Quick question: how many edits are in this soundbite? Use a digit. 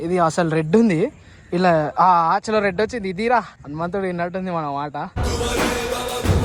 0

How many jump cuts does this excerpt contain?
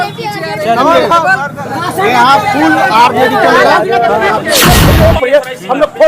1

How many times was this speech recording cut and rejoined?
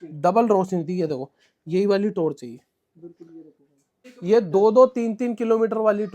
1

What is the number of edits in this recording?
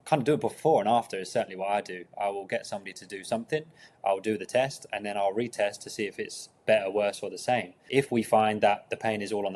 1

